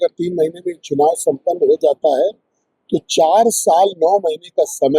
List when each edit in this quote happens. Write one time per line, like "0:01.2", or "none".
none